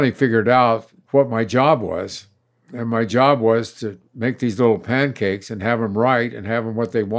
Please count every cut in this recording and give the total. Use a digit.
1